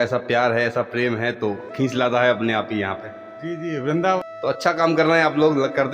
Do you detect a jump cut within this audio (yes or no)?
yes